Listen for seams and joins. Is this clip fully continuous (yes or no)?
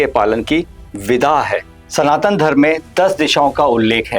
no